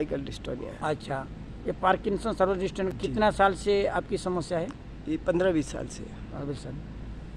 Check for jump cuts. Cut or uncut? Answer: cut